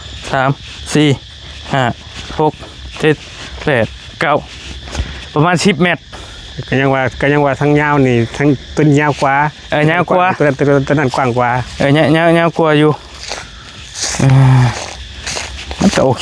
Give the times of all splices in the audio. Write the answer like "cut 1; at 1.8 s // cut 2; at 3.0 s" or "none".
none